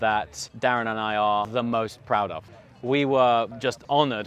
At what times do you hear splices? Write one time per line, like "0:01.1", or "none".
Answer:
none